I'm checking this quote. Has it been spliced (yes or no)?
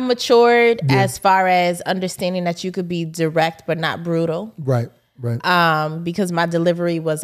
no